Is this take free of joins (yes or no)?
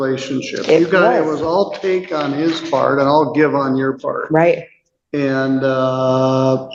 yes